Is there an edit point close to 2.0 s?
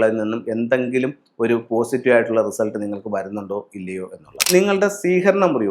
no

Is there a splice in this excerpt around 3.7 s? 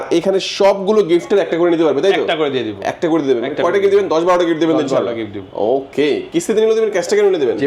no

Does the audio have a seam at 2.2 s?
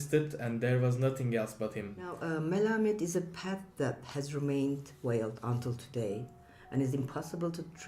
yes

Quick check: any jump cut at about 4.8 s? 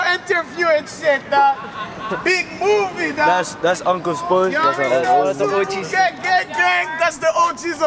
no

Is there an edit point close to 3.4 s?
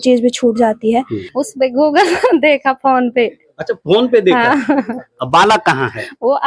no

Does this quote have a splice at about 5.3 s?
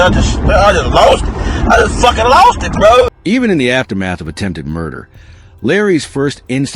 no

